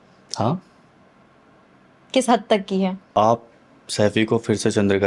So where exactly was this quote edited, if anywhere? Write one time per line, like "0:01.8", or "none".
0:03.1